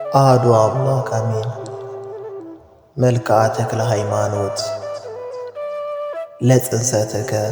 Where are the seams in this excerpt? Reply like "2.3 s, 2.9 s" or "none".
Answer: 1.6 s, 3.0 s